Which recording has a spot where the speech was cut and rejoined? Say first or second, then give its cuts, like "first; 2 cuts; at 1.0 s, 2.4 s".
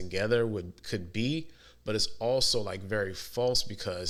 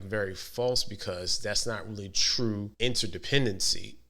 second; 1 cut; at 2.7 s